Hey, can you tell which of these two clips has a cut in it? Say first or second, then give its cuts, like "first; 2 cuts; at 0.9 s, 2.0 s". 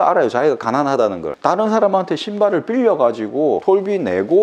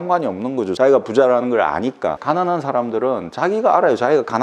second; 2 cuts; at 0.8 s, 2.1 s